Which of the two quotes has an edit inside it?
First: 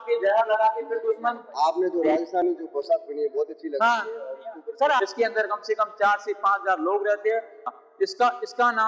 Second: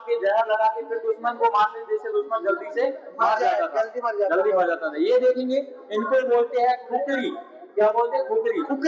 first; 3 cuts; at 1.4 s, 5.0 s, 7.6 s

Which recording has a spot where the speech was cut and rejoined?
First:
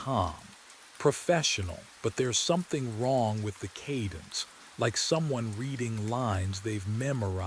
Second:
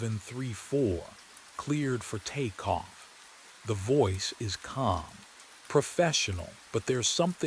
second; 1 cut; at 2.3 s

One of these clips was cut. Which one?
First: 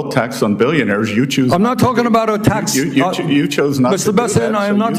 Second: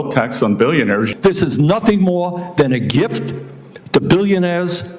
second; 1 cut; at 1.1 s

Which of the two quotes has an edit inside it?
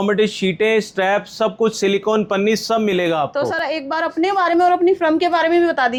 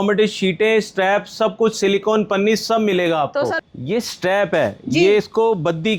second; 1 cut; at 3.6 s

